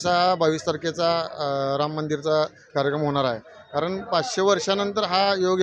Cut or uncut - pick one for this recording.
uncut